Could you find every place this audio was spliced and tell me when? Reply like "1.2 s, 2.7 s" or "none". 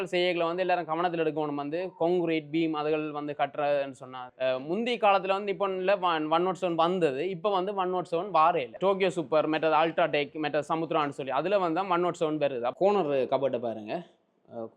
4.3 s, 8.7 s, 12.7 s